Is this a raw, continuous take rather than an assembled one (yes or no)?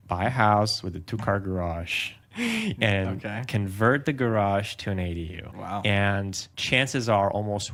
yes